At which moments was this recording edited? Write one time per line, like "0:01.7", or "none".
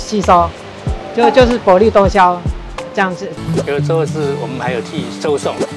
0:03.3